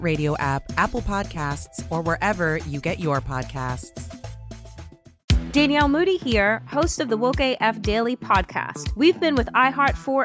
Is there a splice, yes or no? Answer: yes